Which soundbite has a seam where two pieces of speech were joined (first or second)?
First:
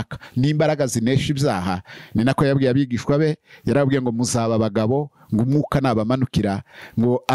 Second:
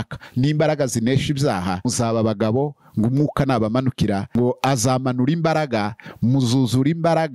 second